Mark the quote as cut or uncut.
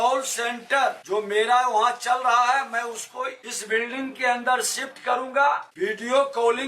cut